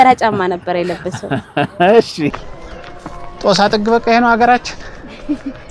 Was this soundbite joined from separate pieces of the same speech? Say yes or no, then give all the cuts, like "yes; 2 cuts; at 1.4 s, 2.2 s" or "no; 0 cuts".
yes; 1 cut; at 2.5 s